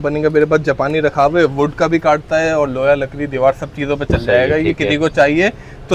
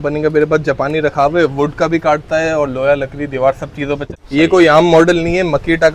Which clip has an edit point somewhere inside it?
second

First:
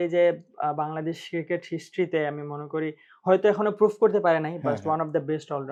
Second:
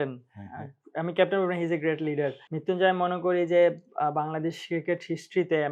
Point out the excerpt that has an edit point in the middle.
second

